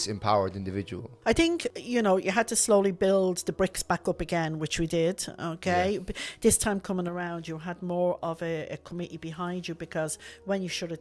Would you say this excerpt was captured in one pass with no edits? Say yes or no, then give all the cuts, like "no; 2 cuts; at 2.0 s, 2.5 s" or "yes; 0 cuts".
no; 2 cuts; at 1.0 s, 1.8 s